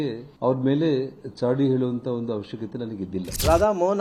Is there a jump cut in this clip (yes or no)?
no